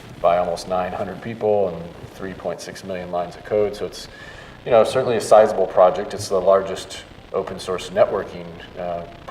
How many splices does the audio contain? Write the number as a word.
one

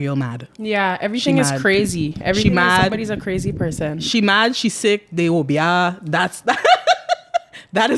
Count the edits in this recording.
zero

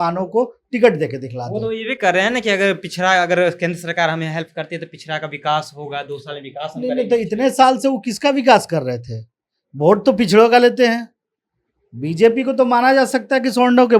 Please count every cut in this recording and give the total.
zero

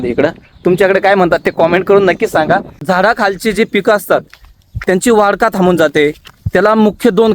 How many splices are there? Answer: one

